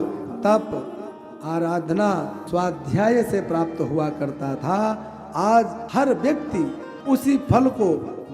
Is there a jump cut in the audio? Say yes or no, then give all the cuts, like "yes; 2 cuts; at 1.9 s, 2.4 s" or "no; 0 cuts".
yes; 2 cuts; at 2.4 s, 5.8 s